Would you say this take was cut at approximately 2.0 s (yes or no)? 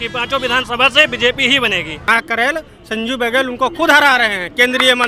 yes